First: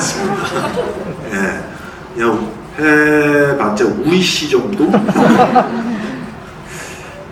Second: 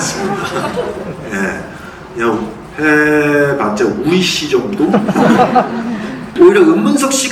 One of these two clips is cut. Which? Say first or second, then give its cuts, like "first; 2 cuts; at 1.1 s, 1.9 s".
second; 1 cut; at 6.2 s